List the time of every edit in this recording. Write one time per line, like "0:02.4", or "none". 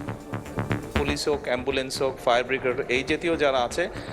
0:01.0